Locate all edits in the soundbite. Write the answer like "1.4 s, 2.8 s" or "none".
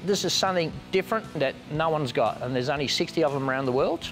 1.4 s